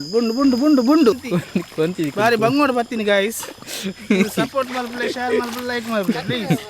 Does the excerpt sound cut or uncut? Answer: cut